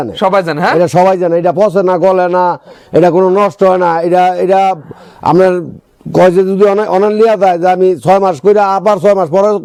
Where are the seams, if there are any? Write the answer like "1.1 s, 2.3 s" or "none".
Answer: none